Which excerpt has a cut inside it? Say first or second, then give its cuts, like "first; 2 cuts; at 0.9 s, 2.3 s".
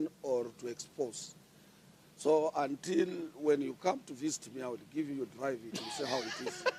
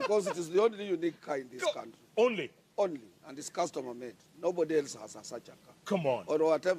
second; 1 cut; at 1.3 s